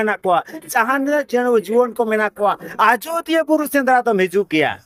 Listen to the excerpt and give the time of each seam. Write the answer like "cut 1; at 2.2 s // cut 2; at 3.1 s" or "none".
none

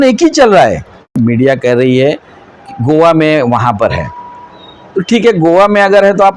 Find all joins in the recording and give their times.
cut 1; at 1.2 s

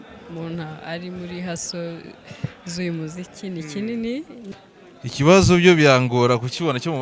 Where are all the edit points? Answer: cut 1; at 4.4 s

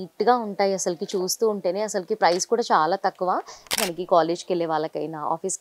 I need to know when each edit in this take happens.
cut 1; at 3.7 s

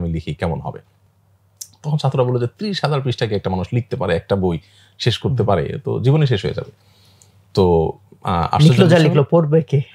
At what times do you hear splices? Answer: none

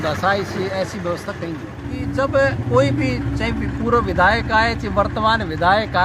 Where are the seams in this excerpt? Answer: cut 1; at 1.3 s

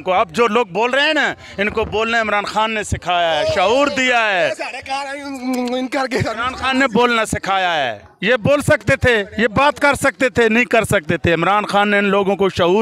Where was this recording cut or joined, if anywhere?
none

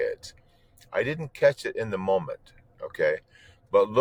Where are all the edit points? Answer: none

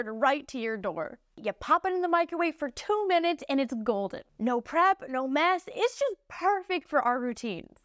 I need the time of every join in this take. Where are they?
cut 1; at 1.4 s

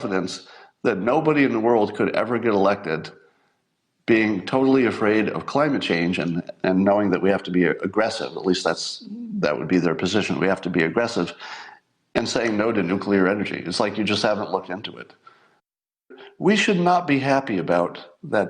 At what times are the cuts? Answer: cut 1; at 16.0 s

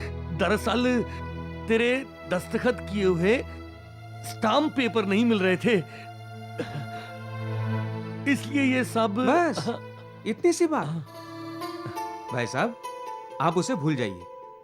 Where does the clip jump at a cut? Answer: none

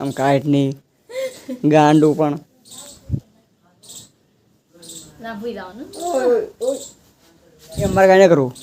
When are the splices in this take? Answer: none

